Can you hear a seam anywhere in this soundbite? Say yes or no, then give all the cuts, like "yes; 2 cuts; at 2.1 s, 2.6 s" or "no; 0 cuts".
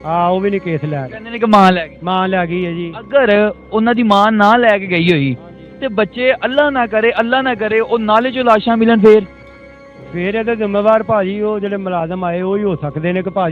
no; 0 cuts